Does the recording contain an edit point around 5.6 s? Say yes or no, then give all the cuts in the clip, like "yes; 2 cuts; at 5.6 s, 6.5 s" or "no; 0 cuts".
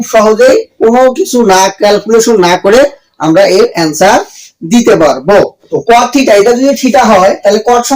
yes; 1 cut; at 5.6 s